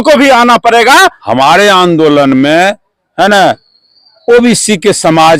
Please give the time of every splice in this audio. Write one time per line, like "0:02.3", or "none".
0:01.2